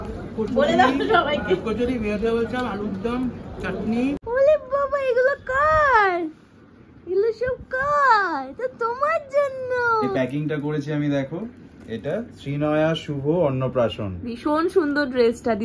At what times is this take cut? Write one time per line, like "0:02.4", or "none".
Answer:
0:04.2
0:10.1